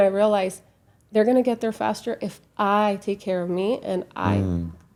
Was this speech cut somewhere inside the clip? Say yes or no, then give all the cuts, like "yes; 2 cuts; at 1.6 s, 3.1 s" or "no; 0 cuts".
no; 0 cuts